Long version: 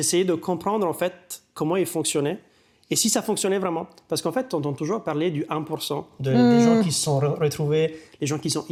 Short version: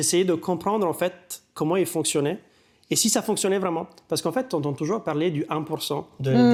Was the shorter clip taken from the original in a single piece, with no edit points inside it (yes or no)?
yes